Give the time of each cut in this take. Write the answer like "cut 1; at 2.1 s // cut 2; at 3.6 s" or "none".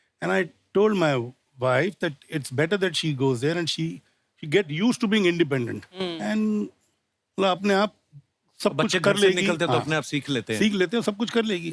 none